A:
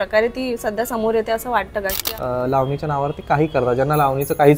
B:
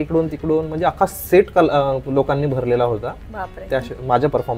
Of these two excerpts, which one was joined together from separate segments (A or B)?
A